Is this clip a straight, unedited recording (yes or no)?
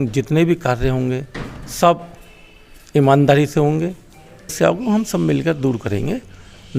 no